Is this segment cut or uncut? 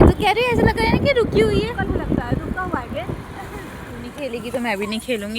cut